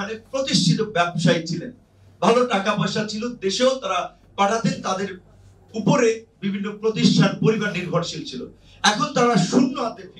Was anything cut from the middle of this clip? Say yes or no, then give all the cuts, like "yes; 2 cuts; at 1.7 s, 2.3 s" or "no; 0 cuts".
no; 0 cuts